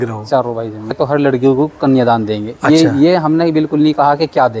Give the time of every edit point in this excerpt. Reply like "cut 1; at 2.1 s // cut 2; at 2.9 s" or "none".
cut 1; at 0.9 s